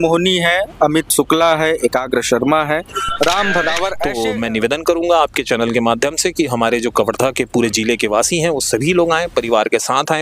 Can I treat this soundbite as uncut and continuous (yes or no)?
no